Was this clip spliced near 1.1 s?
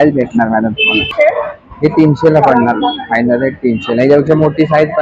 yes; 1 cut; at 1.1 s

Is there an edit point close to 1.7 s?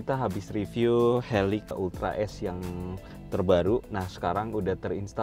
yes; 1 cut; at 1.7 s

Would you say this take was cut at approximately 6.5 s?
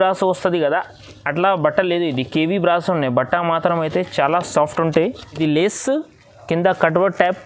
no; 1 cut; at 5.2 s

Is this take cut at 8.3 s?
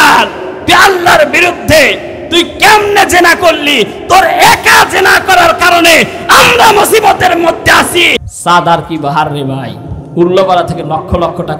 yes; 1 cut; at 8.3 s

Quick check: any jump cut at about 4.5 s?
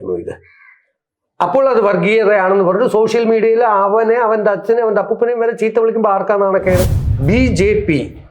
no; 1 cut; at 7.1 s

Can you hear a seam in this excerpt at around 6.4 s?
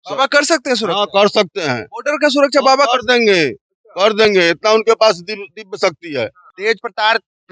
yes; 1 cut; at 6.4 s

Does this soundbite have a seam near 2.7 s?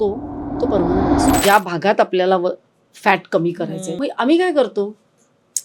no; 2 cuts; at 1.4 s, 3.9 s

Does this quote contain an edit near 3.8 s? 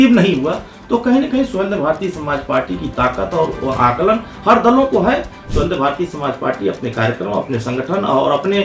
no; 0 cuts

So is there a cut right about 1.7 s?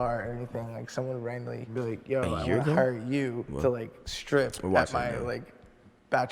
yes; 1 cut; at 1.7 s

